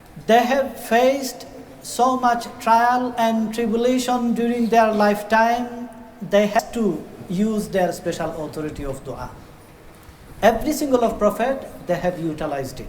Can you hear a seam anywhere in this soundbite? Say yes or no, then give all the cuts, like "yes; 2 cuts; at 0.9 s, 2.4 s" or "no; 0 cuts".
yes; 1 cut; at 6.6 s